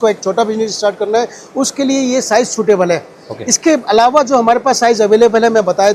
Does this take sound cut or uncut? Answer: uncut